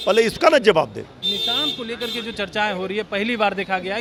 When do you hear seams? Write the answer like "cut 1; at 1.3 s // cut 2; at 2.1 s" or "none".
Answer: none